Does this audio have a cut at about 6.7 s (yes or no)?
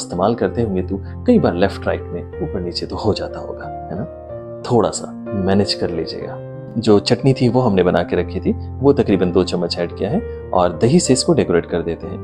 yes